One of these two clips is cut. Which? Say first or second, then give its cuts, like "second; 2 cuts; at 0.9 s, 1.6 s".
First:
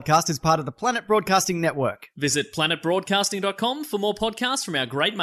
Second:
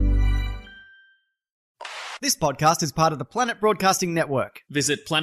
second; 1 cut; at 1.6 s